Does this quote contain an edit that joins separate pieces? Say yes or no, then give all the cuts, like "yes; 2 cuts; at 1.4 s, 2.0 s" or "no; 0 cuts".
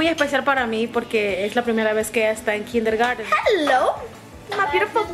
yes; 1 cut; at 3.2 s